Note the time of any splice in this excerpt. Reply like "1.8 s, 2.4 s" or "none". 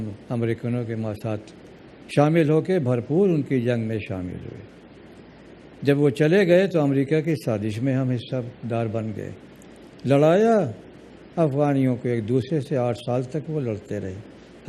2.3 s